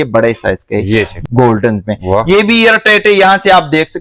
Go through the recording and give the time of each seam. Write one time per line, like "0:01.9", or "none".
0:01.1